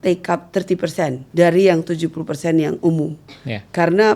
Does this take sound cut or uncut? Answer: cut